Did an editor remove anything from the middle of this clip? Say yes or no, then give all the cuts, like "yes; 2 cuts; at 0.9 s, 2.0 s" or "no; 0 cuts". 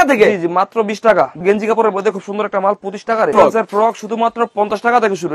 yes; 2 cuts; at 1.4 s, 3.3 s